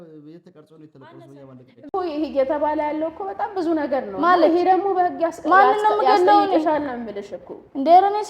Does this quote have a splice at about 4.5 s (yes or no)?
no